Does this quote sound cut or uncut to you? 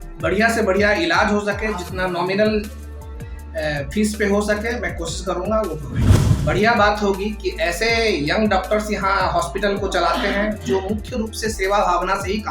cut